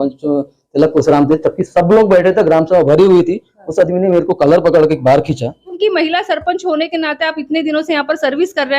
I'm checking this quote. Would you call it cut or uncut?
cut